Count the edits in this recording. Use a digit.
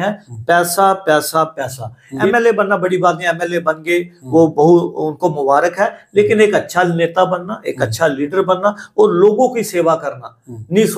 1